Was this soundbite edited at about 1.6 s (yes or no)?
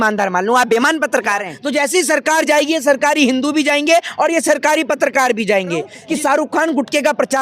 yes